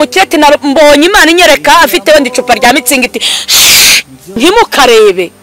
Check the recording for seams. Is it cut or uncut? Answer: cut